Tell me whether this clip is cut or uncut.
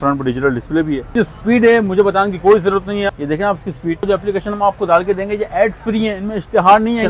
cut